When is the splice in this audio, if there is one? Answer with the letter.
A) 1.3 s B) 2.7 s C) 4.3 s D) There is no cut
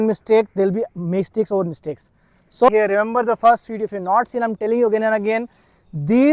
B